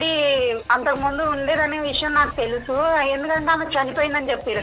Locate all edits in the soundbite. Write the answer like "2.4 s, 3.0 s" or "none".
none